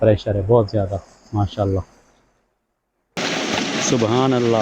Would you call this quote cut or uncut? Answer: cut